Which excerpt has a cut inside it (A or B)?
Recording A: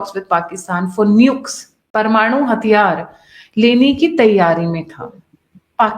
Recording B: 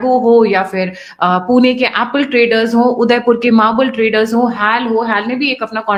A